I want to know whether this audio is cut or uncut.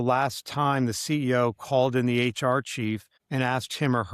cut